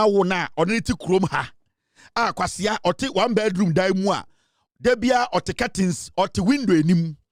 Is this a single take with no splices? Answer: yes; 0 cuts

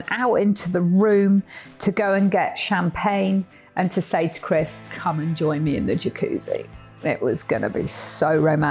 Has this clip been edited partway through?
yes; 1 cut; at 4.8 s

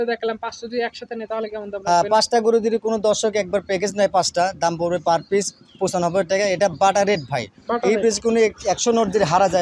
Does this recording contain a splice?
no; 0 cuts

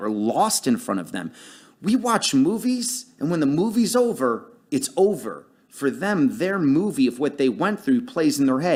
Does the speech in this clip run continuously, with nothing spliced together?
yes; 0 cuts

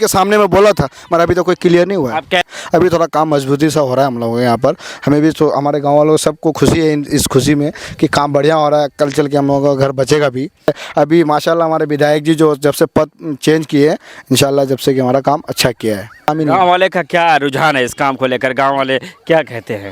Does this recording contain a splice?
yes; 3 cuts; at 2.4 s, 10.7 s, 16.3 s

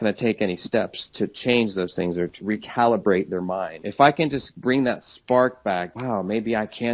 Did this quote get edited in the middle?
yes; 4 cuts; at 2.4 s, 3.8 s, 4.5 s, 5.9 s

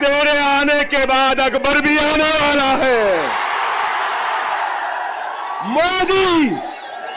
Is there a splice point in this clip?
no; 0 cuts

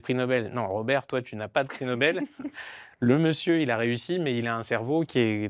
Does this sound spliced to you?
no; 0 cuts

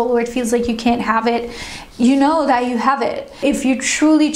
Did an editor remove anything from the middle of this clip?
yes; 1 cut; at 3.4 s

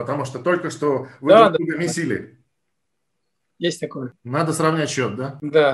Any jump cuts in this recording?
yes; 1 cut; at 4.1 s

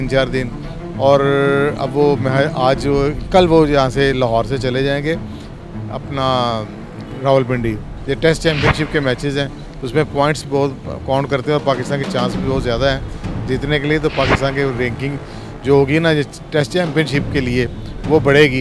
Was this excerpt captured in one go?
no; 1 cut; at 7.9 s

